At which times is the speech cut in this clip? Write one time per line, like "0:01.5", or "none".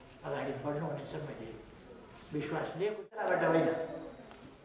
0:03.1